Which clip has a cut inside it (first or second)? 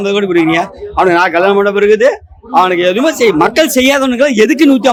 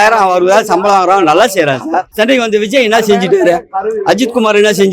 second